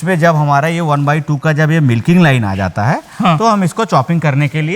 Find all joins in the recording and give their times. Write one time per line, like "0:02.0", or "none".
none